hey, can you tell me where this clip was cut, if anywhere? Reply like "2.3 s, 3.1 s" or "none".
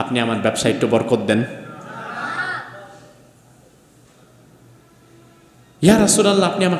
none